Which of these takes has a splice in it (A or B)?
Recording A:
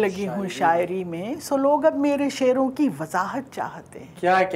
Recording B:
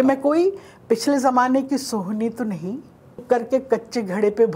B